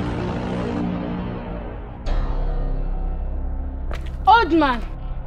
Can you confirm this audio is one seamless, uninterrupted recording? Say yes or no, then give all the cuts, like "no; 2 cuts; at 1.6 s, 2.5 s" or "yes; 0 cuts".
yes; 0 cuts